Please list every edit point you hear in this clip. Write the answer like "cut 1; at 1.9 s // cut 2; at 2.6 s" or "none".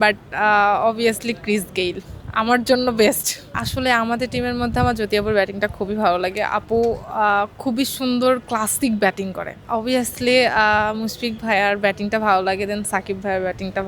cut 1; at 3.5 s // cut 2; at 9.6 s